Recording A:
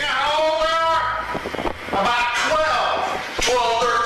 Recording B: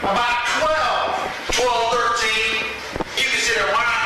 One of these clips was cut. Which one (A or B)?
B